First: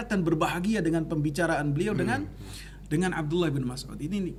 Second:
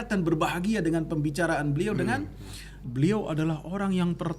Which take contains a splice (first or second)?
second